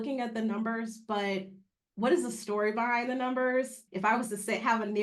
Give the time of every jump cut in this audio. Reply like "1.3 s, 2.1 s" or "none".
3.8 s